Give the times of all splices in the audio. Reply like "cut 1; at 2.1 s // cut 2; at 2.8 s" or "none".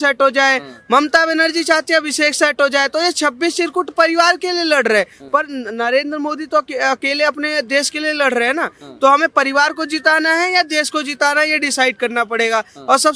none